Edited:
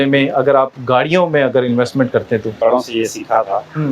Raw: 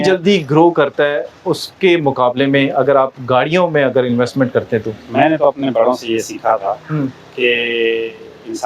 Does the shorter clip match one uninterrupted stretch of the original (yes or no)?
no